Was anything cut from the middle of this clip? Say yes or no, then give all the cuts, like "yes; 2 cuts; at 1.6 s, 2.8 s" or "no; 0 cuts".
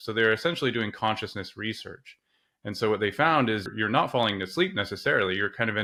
no; 0 cuts